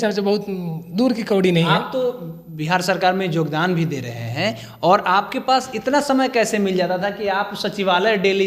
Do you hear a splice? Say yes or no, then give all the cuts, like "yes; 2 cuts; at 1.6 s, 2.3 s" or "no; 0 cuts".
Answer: no; 0 cuts